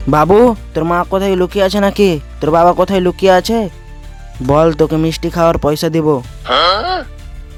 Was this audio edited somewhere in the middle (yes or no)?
no